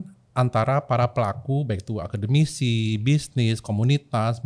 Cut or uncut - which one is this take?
uncut